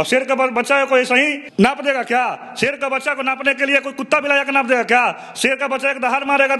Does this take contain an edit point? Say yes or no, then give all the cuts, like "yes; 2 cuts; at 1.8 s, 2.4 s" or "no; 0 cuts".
no; 0 cuts